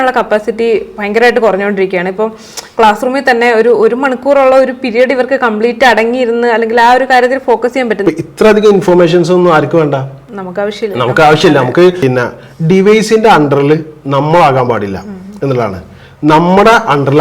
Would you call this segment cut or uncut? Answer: cut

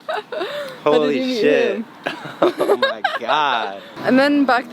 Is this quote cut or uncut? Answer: cut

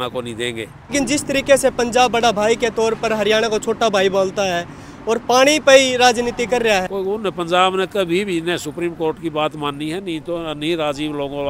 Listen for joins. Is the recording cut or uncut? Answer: cut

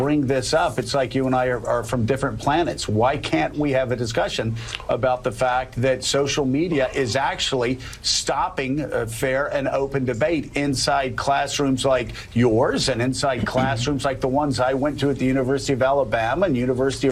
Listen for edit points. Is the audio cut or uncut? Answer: uncut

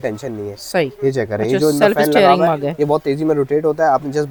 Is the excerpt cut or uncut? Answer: uncut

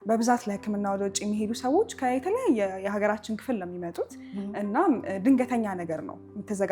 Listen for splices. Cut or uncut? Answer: uncut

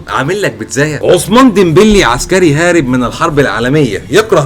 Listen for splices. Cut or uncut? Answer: cut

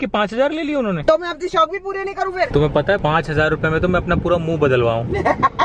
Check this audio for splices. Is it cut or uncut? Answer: cut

